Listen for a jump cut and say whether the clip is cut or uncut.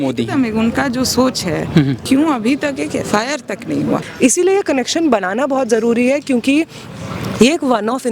cut